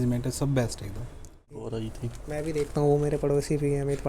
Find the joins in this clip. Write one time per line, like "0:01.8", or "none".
0:01.7